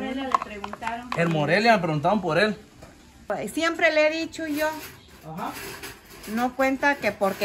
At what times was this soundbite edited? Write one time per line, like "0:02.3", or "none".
0:03.3